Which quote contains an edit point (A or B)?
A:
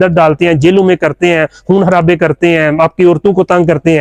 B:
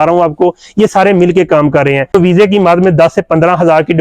B